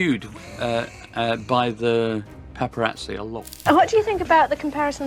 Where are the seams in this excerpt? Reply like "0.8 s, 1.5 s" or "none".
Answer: 3.4 s